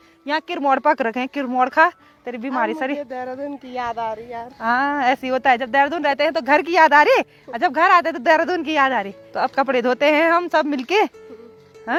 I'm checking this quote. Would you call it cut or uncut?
uncut